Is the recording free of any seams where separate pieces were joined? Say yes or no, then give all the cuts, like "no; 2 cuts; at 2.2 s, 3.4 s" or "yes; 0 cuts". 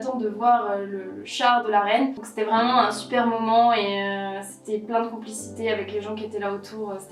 yes; 0 cuts